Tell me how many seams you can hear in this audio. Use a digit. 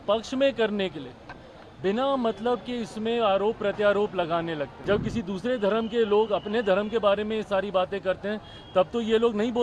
1